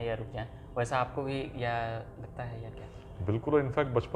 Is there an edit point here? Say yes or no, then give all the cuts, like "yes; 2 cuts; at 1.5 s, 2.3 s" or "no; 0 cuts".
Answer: no; 0 cuts